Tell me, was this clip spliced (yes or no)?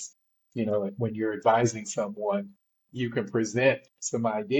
no